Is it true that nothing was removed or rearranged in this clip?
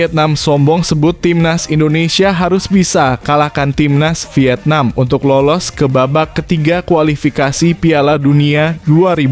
yes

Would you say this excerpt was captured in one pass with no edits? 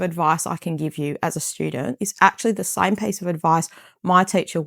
yes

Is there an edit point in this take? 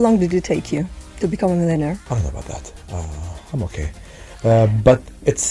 yes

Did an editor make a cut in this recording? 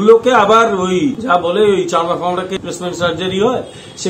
yes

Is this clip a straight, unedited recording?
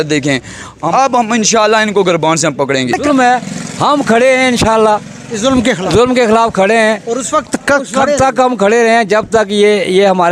no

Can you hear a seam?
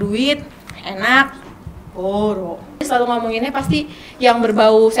yes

